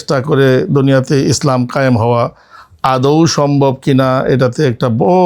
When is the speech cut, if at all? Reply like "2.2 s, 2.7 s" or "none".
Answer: none